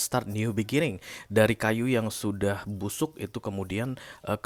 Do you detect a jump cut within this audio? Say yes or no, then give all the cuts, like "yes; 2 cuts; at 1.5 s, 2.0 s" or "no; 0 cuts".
no; 0 cuts